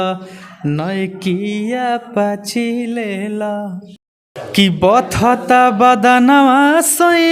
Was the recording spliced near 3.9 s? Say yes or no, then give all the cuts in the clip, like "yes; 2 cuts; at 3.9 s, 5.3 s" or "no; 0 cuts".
yes; 1 cut; at 3.9 s